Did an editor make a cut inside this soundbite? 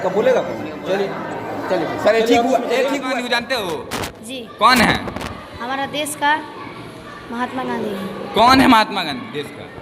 yes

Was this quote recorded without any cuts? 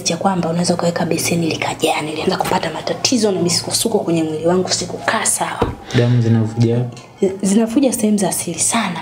yes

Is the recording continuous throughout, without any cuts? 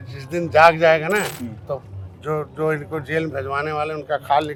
yes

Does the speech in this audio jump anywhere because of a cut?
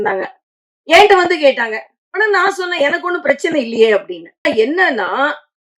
yes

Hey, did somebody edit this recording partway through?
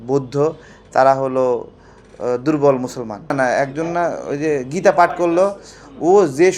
yes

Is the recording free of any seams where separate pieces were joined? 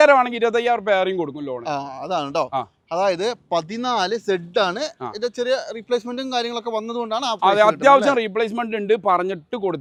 yes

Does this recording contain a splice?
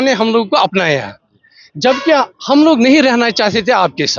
no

